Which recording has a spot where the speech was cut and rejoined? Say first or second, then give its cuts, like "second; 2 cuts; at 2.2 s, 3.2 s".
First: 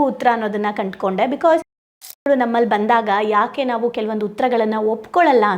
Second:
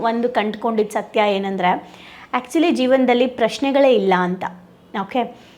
first; 1 cut; at 2.0 s